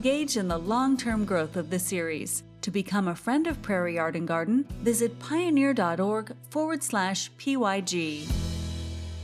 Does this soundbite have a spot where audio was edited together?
yes; 1 cut; at 8.2 s

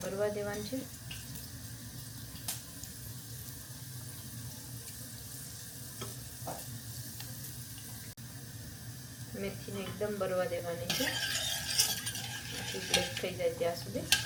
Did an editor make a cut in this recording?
no; 0 cuts

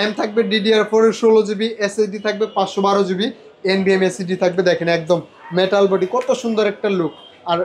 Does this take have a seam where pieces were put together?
no; 0 cuts

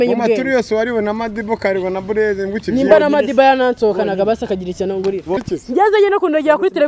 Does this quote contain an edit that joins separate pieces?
yes; 1 cut; at 5.4 s

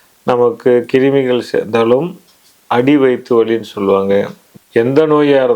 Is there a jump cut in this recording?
yes; 1 cut; at 4.5 s

